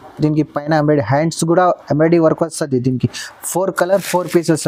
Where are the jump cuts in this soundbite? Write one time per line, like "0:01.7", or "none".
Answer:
none

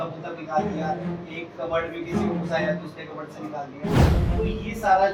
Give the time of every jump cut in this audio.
none

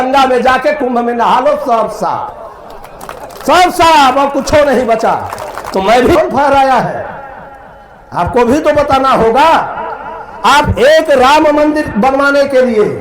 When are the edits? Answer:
0:06.2

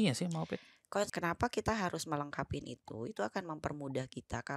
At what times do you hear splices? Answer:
0:01.1

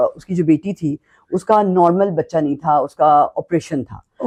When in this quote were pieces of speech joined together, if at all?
none

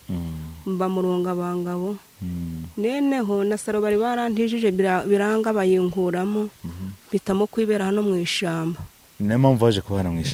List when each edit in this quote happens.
none

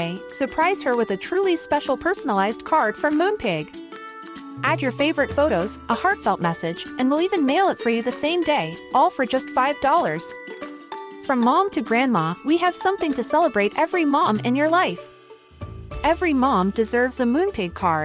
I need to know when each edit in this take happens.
none

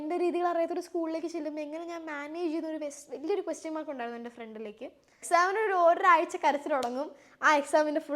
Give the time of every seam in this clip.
0:05.2

